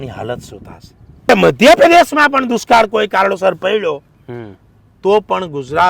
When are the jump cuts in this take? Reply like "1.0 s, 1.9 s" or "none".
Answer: 1.3 s